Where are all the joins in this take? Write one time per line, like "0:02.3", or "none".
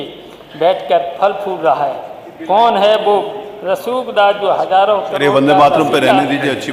none